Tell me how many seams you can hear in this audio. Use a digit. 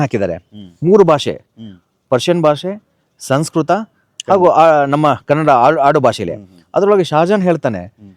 0